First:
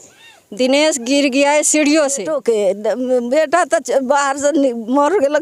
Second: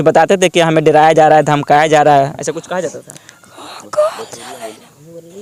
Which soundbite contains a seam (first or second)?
first